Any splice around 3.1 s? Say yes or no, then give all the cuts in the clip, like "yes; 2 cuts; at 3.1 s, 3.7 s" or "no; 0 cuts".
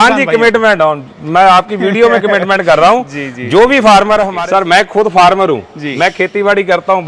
no; 1 cut; at 4.3 s